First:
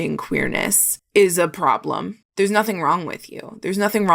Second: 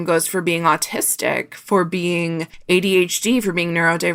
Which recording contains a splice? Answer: first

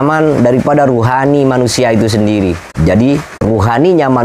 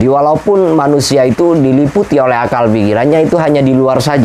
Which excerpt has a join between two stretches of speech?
first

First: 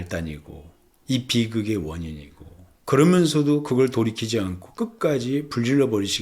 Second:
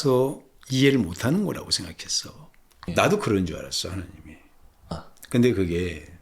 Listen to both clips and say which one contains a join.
second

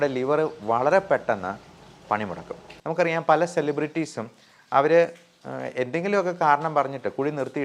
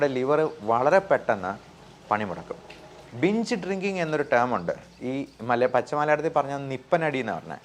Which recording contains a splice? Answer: first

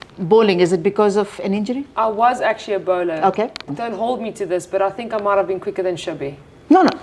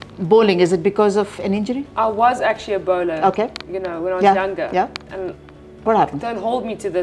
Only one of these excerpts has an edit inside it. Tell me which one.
first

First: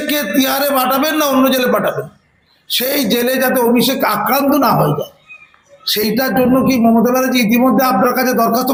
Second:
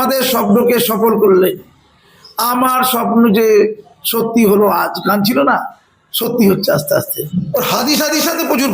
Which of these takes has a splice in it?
second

